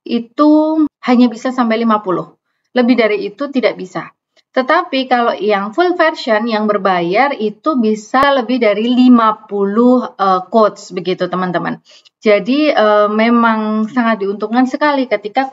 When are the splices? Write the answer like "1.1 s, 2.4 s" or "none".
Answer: none